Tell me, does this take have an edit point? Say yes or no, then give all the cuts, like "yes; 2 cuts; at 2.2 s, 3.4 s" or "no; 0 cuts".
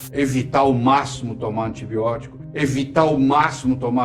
no; 0 cuts